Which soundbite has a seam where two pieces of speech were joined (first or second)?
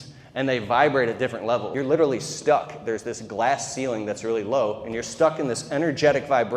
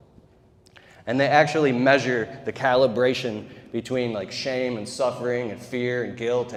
first